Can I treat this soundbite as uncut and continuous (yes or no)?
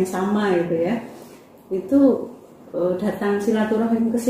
yes